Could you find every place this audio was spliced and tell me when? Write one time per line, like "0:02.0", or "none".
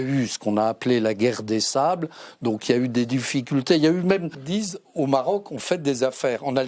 0:04.4